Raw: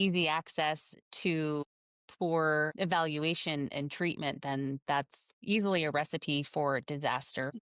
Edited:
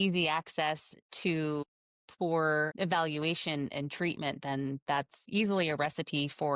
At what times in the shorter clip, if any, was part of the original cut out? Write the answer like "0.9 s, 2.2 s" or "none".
5.2 s